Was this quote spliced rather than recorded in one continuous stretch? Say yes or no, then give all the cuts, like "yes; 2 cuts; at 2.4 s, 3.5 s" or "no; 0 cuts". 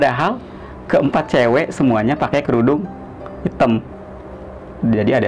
no; 0 cuts